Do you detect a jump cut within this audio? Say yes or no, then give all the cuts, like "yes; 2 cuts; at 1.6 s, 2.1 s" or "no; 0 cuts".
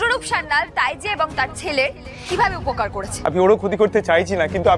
yes; 1 cut; at 3.2 s